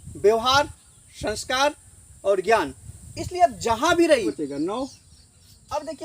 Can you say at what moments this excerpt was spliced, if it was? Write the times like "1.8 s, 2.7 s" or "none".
4.3 s